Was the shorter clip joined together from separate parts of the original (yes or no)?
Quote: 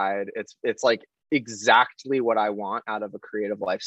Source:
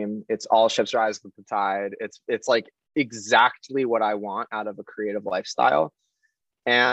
no